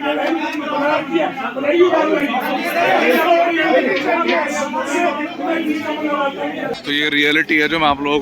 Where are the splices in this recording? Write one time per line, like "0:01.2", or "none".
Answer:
0:06.7